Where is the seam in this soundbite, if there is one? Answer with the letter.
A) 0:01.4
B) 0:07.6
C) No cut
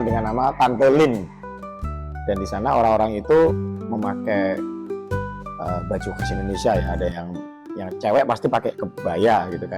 A